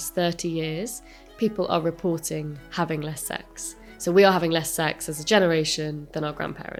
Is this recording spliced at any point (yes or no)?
no